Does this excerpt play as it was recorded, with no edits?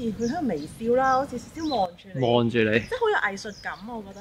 yes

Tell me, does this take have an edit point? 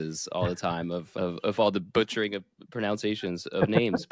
no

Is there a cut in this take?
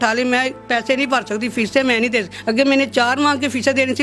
yes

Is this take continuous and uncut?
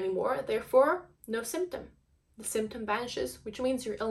no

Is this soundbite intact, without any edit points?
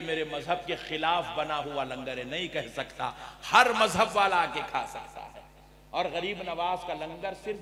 yes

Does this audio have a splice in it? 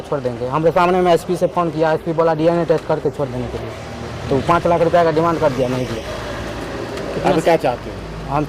no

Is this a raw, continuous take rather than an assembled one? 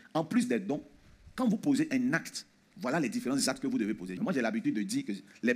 no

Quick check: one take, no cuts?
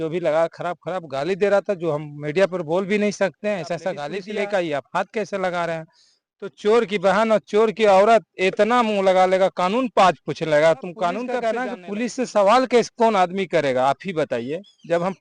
no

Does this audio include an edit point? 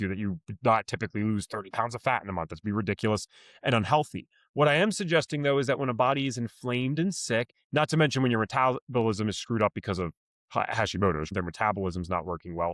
yes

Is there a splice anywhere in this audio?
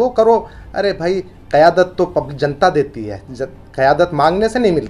no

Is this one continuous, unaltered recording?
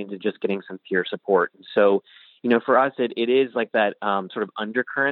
yes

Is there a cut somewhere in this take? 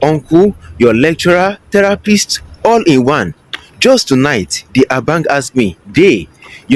no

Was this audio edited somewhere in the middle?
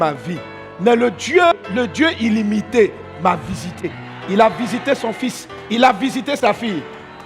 yes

